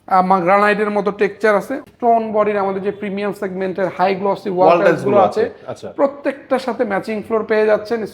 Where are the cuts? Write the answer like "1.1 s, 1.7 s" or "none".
1.8 s